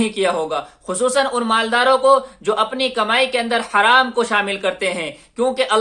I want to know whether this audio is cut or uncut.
uncut